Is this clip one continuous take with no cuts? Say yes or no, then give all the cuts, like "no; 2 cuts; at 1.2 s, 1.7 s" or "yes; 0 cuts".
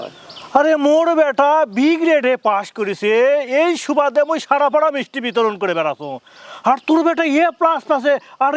yes; 0 cuts